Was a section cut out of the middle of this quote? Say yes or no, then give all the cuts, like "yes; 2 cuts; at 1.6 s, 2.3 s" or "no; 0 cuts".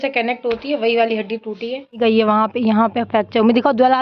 yes; 1 cut; at 2.0 s